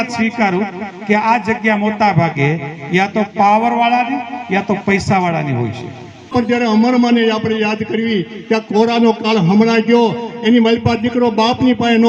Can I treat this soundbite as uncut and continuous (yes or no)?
no